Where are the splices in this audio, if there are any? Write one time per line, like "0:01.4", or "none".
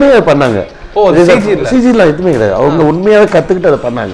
none